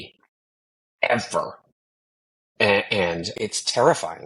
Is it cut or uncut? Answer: cut